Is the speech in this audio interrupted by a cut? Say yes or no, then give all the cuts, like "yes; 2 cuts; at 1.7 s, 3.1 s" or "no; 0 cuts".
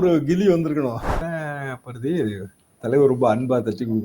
yes; 1 cut; at 1.2 s